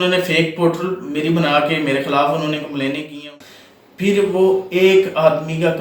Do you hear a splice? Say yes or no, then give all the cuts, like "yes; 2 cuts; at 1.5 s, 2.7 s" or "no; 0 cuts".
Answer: yes; 1 cut; at 3.2 s